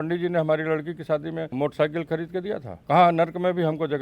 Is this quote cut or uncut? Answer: cut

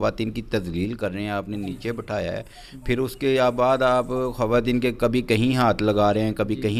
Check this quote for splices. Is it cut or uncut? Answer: uncut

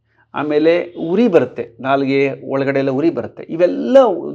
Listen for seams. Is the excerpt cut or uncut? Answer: uncut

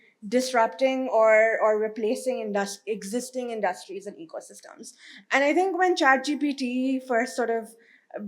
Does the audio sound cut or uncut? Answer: uncut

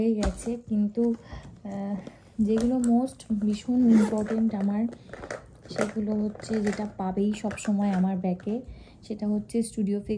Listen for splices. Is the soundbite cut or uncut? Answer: uncut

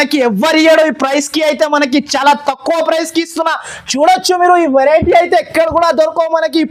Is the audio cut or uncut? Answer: uncut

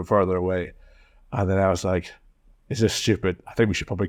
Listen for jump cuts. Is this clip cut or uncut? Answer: uncut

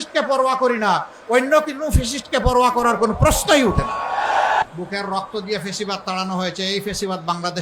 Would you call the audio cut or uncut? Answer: cut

